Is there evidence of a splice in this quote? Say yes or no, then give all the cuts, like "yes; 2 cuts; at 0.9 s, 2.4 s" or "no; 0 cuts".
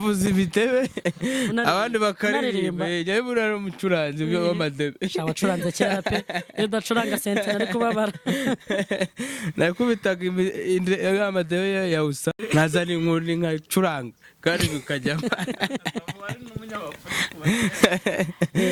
no; 0 cuts